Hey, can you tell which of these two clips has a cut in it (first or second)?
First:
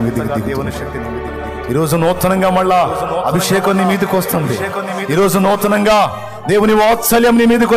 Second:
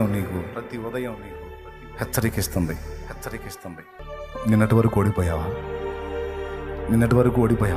second